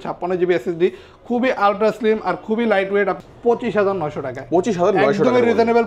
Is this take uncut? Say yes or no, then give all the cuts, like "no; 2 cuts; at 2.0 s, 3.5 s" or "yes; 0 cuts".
no; 1 cut; at 3.3 s